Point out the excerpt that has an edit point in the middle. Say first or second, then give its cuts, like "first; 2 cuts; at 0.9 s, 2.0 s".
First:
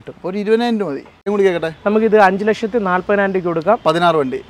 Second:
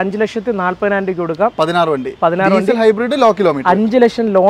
first; 1 cut; at 1.2 s